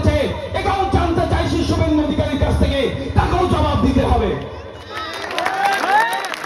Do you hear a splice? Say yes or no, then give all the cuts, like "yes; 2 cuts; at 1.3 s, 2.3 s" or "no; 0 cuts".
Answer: no; 0 cuts